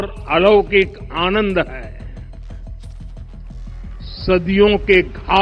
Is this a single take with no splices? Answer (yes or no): yes